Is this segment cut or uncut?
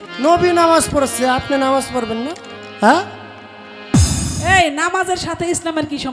cut